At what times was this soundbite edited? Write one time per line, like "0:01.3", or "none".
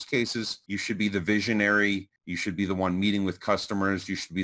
none